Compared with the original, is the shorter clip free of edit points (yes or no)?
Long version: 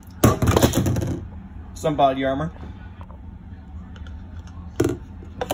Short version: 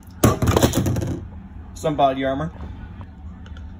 no